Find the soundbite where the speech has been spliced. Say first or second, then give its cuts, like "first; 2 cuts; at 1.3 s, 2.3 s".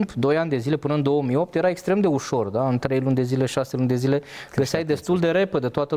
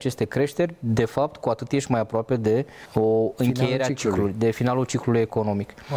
second; 1 cut; at 2.8 s